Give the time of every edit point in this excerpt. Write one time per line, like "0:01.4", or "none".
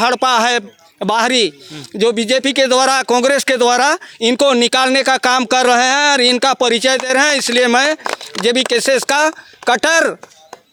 none